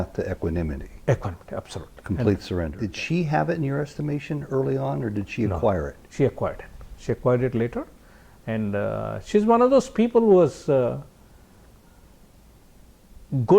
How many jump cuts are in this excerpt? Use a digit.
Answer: 1